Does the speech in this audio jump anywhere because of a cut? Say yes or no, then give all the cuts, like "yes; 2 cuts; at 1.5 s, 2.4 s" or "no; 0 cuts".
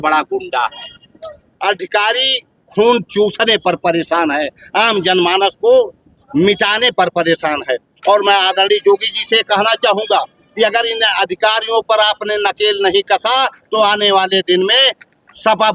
no; 0 cuts